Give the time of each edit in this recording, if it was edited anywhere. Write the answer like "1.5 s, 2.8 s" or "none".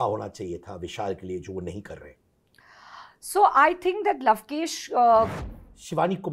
5.3 s